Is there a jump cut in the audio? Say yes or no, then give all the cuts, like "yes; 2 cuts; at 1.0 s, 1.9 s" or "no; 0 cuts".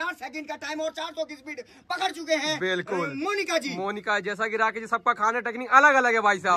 no; 0 cuts